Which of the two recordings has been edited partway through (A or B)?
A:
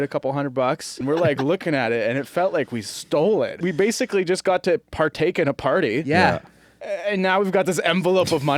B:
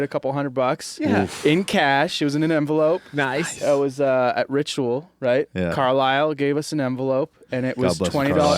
A